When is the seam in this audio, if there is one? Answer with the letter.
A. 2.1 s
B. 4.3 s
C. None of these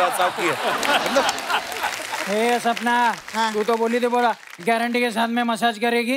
A